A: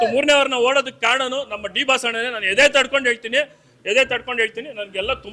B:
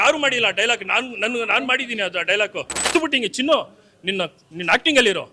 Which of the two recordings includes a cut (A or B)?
B